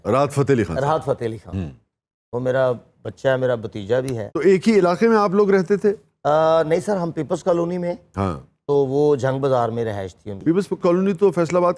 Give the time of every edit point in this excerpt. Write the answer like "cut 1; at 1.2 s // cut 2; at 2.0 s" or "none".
none